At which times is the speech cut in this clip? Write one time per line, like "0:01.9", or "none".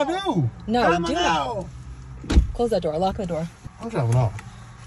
0:03.6